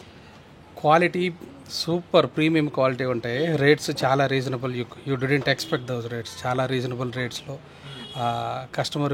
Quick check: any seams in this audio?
no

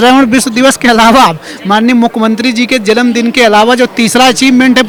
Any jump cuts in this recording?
no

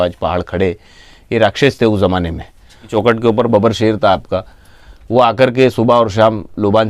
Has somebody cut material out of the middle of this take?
yes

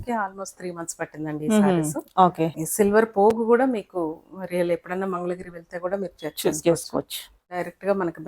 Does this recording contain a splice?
yes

